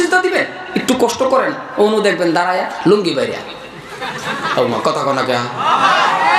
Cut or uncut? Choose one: uncut